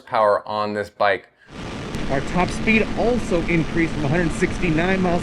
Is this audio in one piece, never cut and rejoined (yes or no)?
no